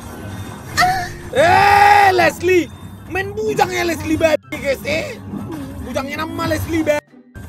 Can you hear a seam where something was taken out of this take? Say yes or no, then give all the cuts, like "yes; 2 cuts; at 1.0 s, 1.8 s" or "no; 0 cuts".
no; 0 cuts